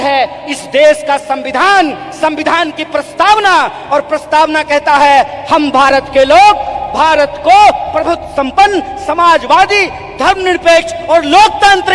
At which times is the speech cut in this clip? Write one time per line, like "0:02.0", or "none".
none